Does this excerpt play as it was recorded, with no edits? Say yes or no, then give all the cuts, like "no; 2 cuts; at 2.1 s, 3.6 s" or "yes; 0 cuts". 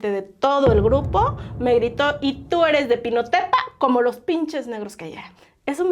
yes; 0 cuts